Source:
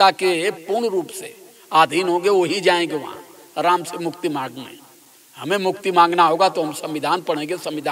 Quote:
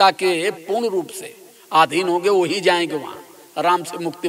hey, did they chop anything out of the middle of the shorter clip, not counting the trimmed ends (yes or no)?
no